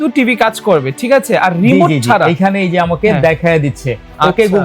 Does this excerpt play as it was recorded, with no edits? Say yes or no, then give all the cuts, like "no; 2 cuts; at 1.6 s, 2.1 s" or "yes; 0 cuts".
yes; 0 cuts